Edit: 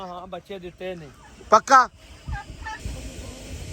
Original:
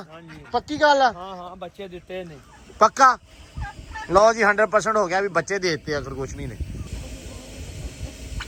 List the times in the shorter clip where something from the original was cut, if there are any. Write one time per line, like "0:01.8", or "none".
0:02.8